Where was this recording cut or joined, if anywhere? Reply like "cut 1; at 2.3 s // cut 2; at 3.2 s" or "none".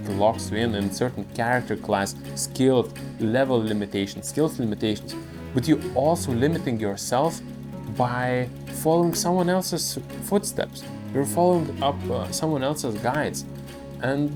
none